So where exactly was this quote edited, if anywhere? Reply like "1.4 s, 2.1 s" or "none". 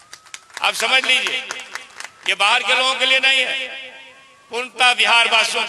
none